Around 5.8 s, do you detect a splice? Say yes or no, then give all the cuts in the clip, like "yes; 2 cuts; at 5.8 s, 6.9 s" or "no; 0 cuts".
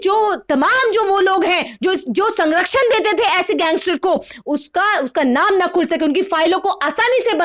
no; 0 cuts